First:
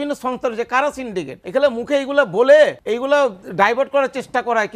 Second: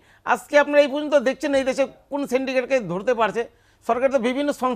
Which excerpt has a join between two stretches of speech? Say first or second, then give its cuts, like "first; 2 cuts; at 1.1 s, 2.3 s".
first; 2 cuts; at 1.4 s, 2.8 s